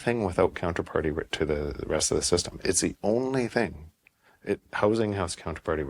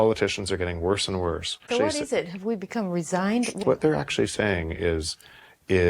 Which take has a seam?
second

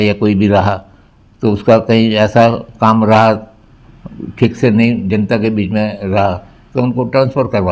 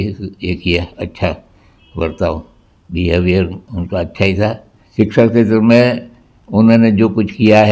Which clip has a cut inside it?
second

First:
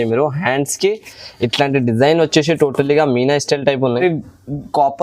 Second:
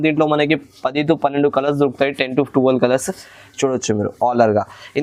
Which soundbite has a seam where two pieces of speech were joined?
first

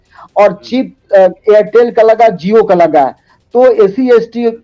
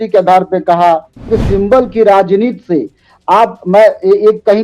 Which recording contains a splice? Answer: second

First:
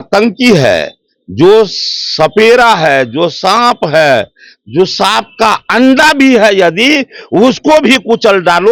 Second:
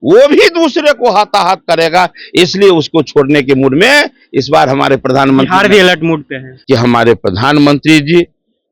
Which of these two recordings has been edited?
second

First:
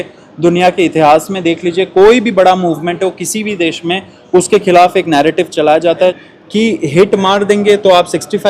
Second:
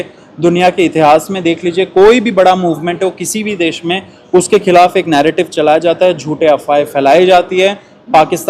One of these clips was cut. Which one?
first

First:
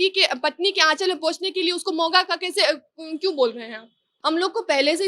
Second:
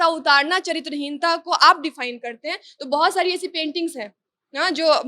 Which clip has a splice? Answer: first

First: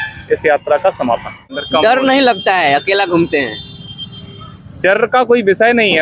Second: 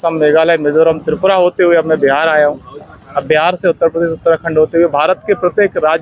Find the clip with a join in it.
first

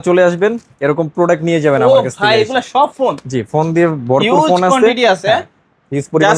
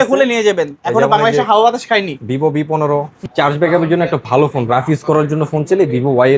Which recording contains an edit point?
second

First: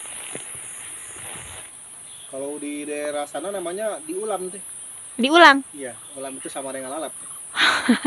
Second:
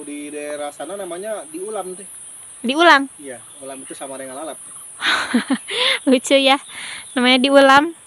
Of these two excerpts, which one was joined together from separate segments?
first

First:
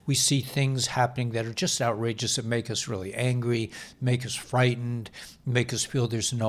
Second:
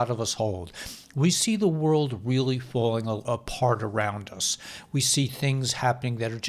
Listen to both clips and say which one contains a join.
second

